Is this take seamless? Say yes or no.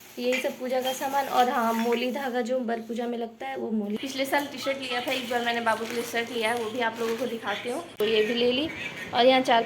no